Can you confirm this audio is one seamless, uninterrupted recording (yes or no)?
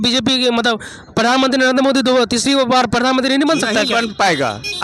yes